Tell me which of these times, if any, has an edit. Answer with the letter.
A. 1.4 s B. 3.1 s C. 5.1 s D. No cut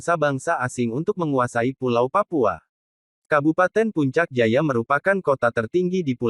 B